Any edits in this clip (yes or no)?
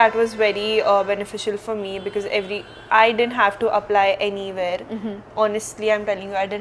no